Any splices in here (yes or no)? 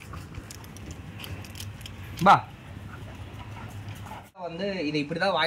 yes